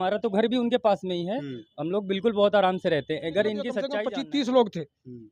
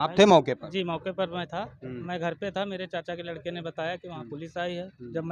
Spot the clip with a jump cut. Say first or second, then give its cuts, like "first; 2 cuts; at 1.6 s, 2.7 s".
first; 1 cut; at 3.9 s